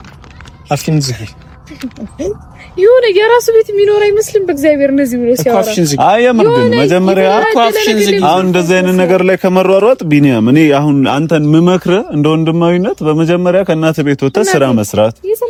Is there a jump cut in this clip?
no; 0 cuts

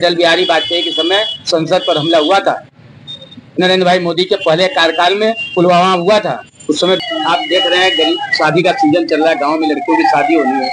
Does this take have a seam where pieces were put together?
yes; 1 cut; at 7.0 s

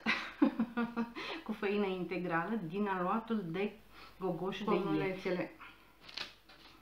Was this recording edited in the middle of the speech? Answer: yes; 1 cut; at 5.0 s

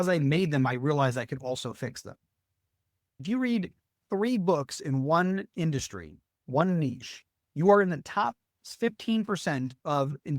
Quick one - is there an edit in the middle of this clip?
yes; 1 cut; at 3.2 s

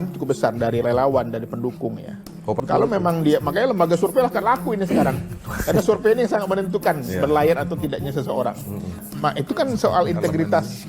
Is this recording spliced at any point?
yes; 2 cuts; at 2.6 s, 9.0 s

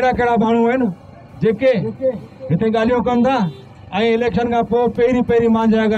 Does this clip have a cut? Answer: no; 0 cuts

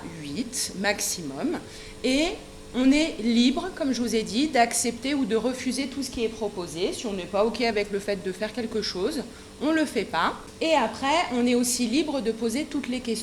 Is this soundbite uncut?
no; 1 cut; at 10.5 s

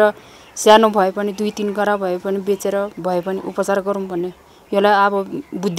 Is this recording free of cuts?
yes; 0 cuts

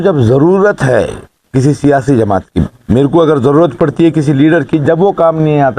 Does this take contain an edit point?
yes; 1 cut; at 2.8 s

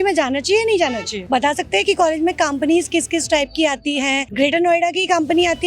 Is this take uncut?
no; 2 cuts; at 1.1 s, 4.3 s

